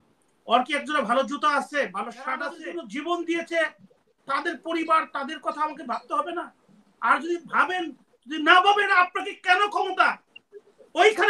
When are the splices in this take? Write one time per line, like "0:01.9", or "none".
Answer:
0:02.6